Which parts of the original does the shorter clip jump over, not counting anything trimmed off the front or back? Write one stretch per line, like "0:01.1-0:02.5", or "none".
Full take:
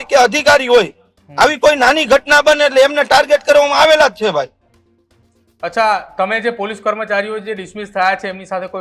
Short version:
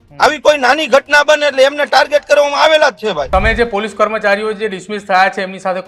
0:04.5-0:06.1